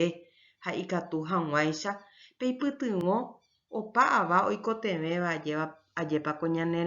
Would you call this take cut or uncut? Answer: cut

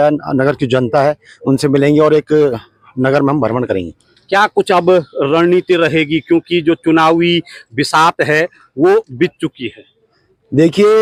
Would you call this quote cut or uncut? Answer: uncut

